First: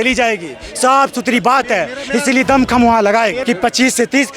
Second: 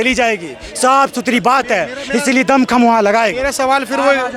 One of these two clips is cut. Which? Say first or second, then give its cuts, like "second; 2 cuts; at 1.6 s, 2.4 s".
first; 1 cut; at 3.4 s